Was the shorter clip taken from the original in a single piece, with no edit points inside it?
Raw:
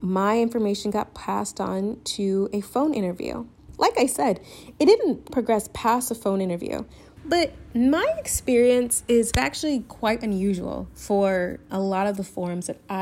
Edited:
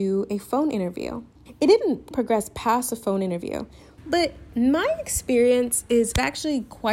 no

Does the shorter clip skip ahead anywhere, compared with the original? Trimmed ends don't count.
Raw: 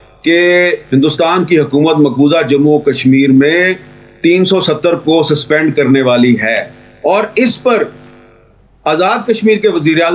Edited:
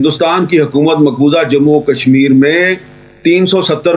no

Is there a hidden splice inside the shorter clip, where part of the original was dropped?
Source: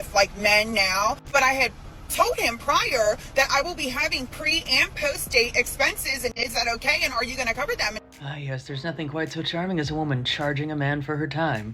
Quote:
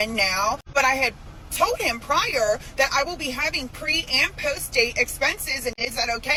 no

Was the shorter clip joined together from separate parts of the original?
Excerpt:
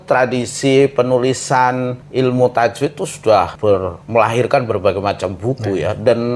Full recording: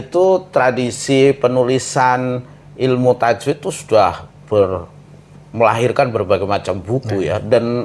yes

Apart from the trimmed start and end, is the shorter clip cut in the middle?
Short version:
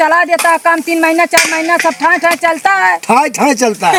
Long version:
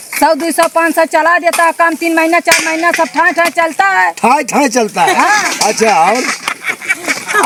no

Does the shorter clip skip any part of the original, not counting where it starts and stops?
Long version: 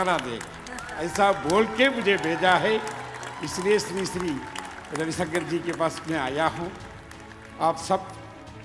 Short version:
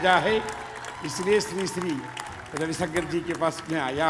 no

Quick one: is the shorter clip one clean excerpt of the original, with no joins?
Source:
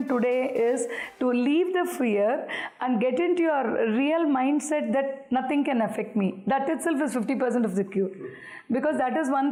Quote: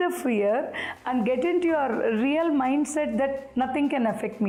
yes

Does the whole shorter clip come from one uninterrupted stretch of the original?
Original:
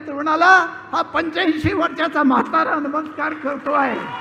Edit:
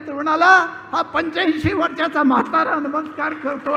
yes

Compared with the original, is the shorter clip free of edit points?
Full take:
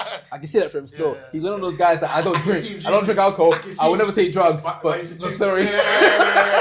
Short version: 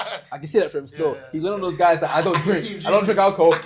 yes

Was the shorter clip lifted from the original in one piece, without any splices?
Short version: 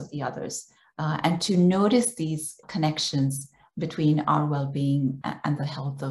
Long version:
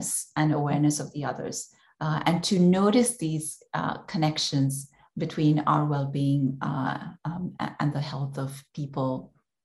no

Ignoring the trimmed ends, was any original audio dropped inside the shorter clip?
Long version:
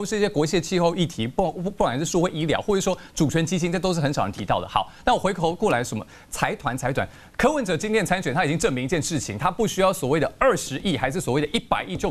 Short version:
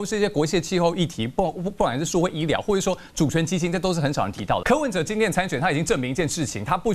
yes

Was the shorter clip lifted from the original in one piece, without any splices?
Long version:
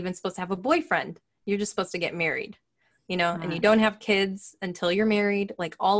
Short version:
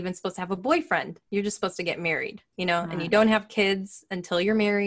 no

